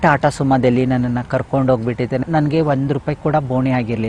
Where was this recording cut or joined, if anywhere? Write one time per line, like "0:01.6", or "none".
none